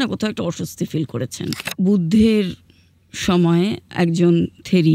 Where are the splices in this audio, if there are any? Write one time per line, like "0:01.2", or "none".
0:01.6